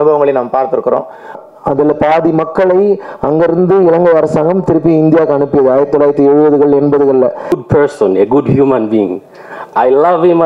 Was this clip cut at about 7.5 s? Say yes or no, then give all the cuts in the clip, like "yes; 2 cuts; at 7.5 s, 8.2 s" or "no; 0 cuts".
yes; 2 cuts; at 1.4 s, 7.5 s